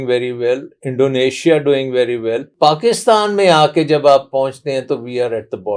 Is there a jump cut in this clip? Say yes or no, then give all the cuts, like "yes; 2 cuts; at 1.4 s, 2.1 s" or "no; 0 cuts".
yes; 1 cut; at 2.5 s